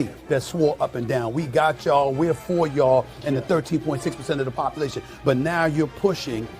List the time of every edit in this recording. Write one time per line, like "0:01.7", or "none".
none